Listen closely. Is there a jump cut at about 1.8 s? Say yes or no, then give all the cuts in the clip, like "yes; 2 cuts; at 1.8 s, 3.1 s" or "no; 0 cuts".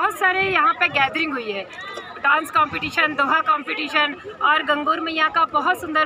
no; 0 cuts